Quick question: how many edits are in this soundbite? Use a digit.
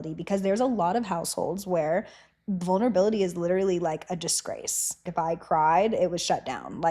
1